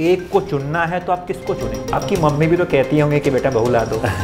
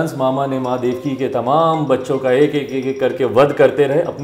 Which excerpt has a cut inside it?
first; 1 cut; at 2.0 s

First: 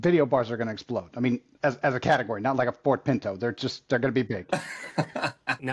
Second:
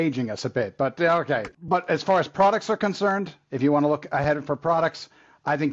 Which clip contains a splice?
second; 1 cut; at 1.5 s

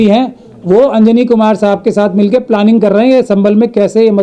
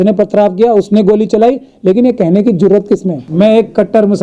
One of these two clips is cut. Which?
second; 1 cut; at 3.2 s

